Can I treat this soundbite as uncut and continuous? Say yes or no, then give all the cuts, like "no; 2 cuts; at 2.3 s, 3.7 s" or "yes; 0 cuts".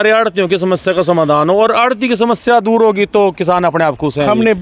yes; 0 cuts